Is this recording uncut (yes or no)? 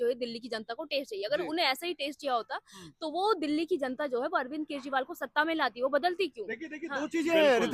yes